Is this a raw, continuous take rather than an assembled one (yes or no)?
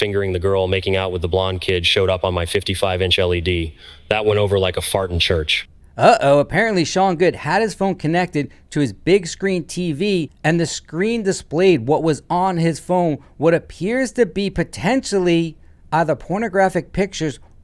yes